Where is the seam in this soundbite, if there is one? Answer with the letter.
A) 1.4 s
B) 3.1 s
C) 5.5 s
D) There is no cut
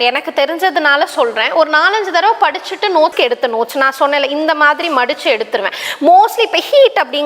B